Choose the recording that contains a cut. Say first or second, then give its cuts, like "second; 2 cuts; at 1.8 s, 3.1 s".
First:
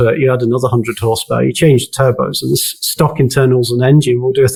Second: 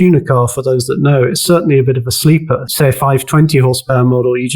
second; 1 cut; at 2.7 s